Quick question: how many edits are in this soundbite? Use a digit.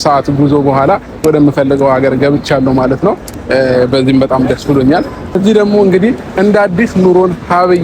1